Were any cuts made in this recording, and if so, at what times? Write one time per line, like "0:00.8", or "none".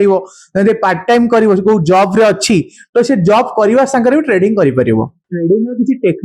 0:05.2